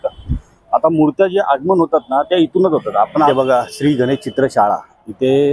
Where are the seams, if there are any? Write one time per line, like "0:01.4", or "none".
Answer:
0:03.3